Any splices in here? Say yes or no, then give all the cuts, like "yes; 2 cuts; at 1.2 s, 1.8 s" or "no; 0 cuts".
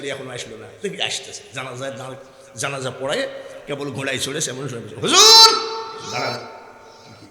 no; 0 cuts